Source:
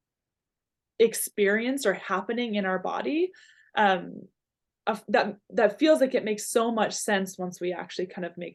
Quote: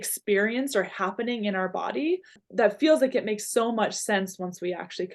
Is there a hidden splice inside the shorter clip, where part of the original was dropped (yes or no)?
yes